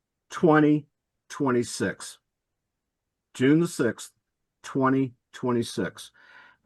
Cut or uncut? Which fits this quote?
uncut